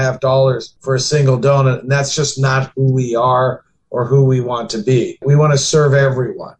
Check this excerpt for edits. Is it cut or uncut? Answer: uncut